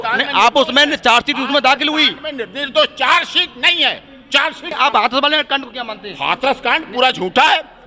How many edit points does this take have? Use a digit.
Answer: 1